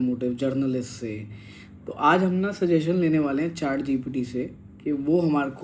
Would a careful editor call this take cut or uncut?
uncut